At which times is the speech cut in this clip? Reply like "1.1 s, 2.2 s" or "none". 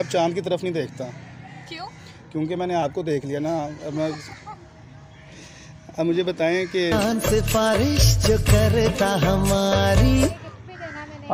10.4 s